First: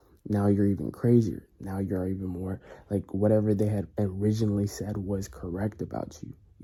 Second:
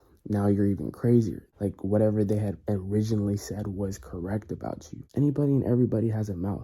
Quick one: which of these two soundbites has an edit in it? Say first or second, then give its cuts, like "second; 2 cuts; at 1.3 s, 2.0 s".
second; 2 cuts; at 1.4 s, 4.9 s